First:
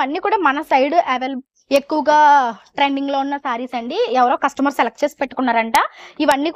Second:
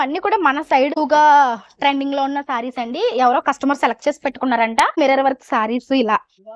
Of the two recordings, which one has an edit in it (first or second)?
second